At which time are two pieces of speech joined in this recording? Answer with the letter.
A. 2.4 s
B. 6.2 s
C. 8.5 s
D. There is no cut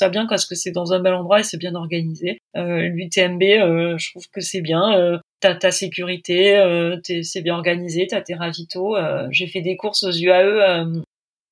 A